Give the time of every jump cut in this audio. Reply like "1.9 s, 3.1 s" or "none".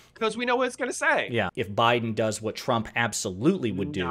1.5 s